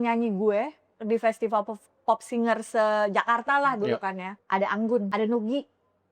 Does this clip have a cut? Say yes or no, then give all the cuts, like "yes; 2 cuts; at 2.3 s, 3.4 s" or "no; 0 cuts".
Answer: yes; 2 cuts; at 4.3 s, 5.1 s